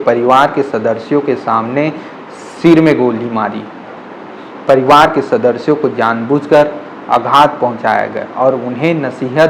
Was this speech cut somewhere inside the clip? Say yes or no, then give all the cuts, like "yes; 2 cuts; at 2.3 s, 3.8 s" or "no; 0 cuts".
no; 0 cuts